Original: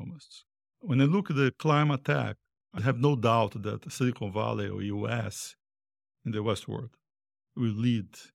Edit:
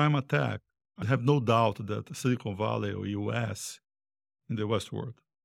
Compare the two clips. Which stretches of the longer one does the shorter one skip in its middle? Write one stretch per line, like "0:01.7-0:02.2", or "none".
none